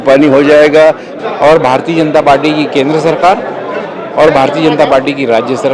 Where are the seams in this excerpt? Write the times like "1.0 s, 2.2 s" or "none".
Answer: 1.1 s